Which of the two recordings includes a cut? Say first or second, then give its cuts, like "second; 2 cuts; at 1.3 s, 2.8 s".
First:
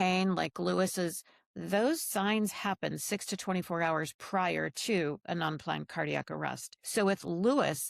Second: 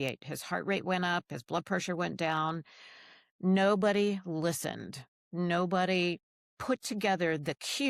first; 1 cut; at 6.7 s